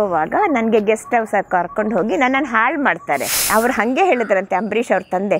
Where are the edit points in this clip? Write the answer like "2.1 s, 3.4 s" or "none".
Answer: 3.4 s